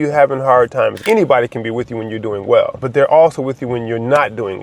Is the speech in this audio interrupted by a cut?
yes; 2 cuts; at 1.0 s, 2.8 s

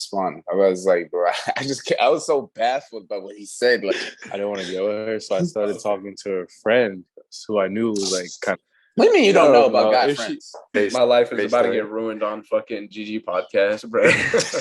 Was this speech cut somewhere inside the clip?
yes; 3 cuts; at 3.9 s, 8.6 s, 10.7 s

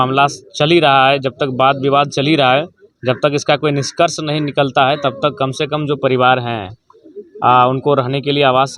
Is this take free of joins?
yes; 0 cuts

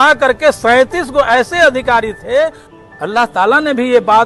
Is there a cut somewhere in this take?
yes; 1 cut; at 2.6 s

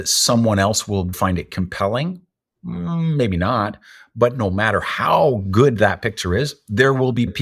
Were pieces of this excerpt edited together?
no; 0 cuts

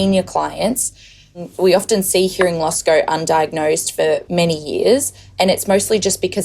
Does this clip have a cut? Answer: yes; 1 cut; at 1.5 s

